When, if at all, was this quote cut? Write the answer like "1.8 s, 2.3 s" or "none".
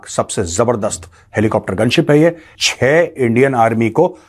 2.5 s